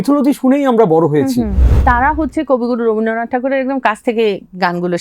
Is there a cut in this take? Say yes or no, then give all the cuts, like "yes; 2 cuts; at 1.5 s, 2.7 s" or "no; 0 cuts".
yes; 1 cut; at 1.6 s